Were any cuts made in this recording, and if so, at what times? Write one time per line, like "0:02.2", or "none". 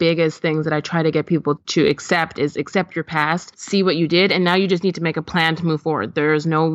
0:01.6
0:03.5

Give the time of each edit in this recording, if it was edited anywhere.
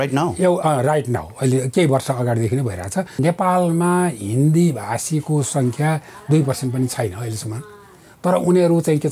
0:03.1

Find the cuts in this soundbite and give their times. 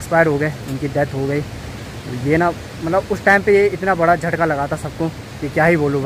none

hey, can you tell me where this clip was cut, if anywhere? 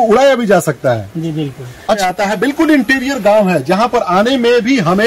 0:02.0

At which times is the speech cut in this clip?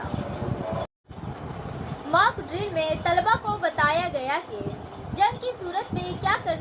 0:01.0

